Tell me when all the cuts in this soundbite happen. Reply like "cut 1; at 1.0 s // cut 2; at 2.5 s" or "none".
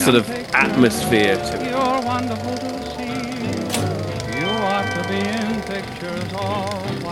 cut 1; at 1.4 s